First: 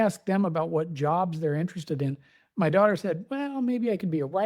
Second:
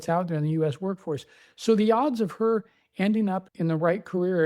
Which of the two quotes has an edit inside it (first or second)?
second